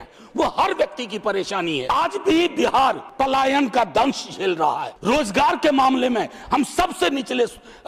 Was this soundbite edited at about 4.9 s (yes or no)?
yes